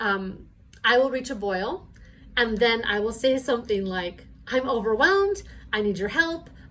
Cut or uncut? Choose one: uncut